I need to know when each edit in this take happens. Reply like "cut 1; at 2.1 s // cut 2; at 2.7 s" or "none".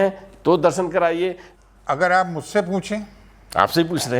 cut 1; at 1.5 s